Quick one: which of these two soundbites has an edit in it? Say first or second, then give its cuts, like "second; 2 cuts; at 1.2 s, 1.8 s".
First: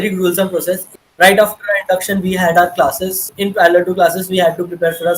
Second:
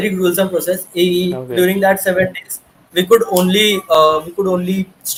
first; 2 cuts; at 0.9 s, 3.2 s